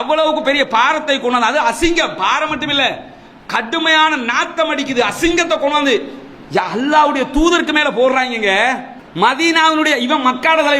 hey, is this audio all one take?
no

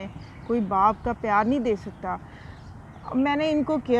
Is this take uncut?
yes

